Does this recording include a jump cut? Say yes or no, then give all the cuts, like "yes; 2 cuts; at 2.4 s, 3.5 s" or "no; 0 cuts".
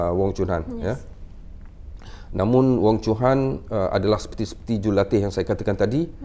no; 0 cuts